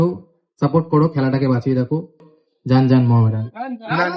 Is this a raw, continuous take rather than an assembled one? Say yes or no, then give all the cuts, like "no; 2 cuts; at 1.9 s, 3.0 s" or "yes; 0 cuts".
no; 1 cut; at 2.3 s